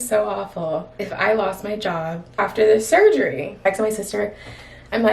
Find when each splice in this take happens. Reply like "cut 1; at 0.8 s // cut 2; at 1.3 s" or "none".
cut 1; at 1.0 s // cut 2; at 2.4 s // cut 3; at 3.6 s